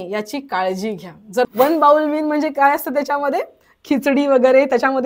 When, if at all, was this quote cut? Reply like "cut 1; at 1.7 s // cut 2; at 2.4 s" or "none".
cut 1; at 1.4 s